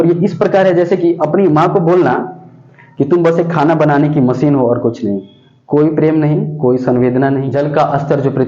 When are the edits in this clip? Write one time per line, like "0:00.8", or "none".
0:07.5